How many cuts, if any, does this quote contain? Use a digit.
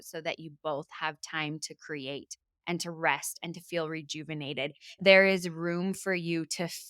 1